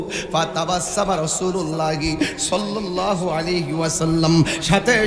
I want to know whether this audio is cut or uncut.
uncut